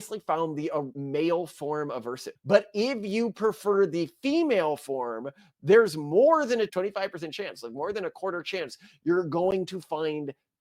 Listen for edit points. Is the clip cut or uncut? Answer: cut